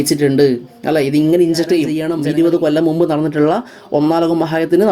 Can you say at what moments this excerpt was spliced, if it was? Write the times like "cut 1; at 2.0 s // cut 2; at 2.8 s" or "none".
cut 1; at 2.0 s